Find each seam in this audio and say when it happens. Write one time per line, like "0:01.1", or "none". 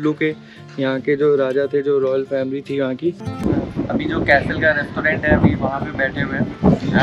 0:03.3